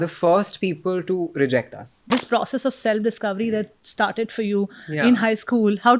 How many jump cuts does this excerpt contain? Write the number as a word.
one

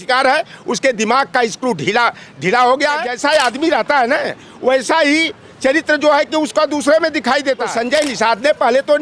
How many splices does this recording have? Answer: two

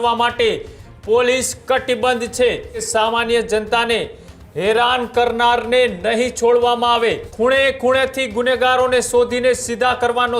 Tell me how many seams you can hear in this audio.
two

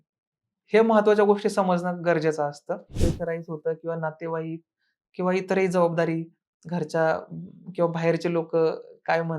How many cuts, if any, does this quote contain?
one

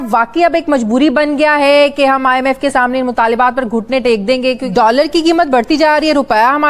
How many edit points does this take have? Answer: one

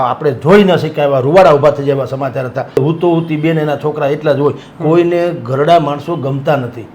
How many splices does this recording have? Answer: one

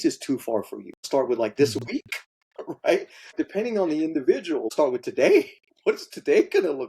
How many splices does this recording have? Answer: three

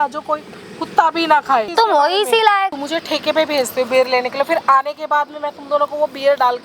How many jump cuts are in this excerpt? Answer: two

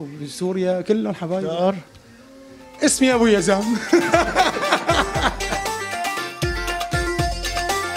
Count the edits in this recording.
one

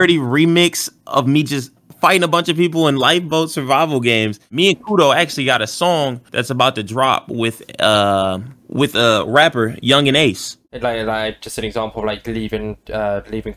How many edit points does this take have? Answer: two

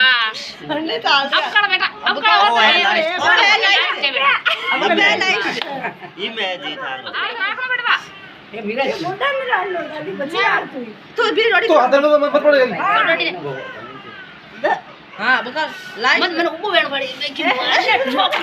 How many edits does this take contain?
one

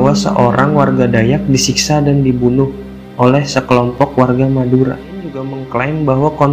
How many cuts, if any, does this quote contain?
one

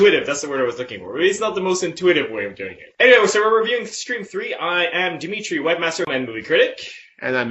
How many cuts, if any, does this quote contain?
zero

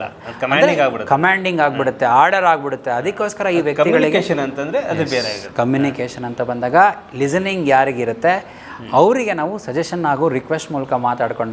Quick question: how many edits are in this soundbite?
zero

